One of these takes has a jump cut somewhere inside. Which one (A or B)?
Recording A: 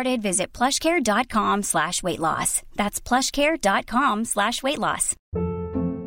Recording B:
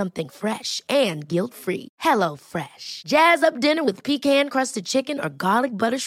A